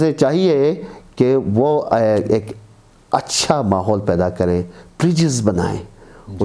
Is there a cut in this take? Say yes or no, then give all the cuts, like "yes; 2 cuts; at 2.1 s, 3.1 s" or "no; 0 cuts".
no; 0 cuts